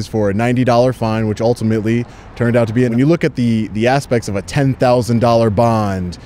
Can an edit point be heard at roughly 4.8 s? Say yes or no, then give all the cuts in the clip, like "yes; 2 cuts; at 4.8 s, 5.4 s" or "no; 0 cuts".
no; 1 cut; at 2.9 s